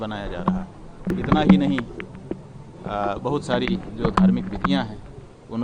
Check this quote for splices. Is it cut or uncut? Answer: cut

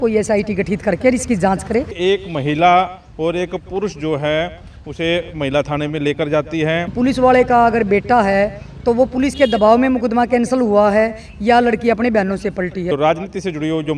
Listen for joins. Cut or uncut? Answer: cut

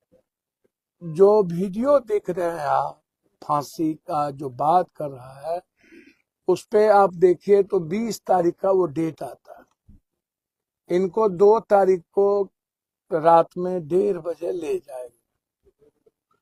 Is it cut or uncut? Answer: uncut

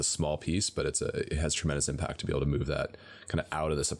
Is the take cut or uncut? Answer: uncut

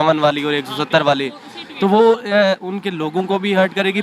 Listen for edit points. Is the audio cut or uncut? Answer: uncut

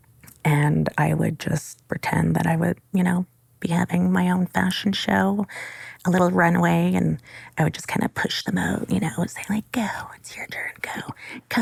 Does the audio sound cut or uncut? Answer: uncut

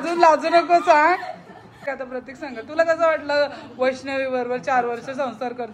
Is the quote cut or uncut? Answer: cut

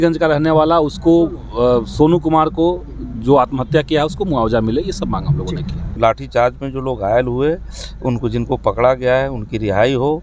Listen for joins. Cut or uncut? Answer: cut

